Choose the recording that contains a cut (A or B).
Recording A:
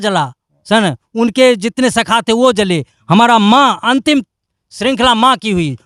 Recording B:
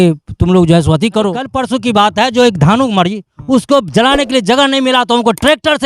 B